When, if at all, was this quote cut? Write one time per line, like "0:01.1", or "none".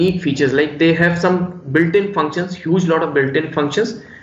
none